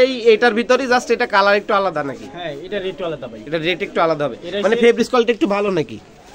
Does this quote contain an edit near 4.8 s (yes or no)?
no